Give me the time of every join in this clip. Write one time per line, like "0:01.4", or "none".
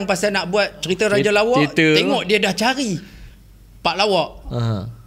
none